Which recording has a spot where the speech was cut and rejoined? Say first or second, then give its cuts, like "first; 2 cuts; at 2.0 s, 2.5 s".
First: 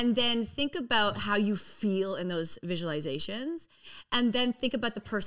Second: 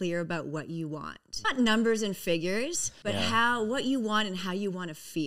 second; 2 cuts; at 1.3 s, 2.9 s